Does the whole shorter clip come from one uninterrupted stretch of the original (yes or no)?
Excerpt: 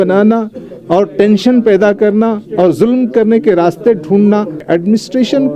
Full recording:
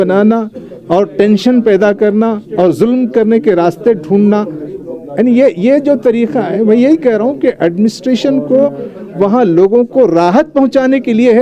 no